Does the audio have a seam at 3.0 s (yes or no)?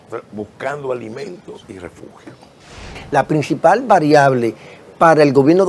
yes